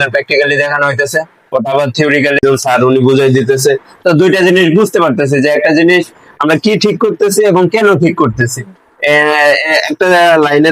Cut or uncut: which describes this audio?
cut